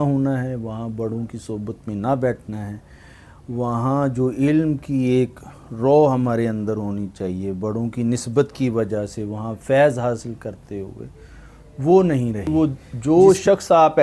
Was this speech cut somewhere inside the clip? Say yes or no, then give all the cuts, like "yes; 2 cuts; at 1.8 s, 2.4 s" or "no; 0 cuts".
yes; 1 cut; at 12.5 s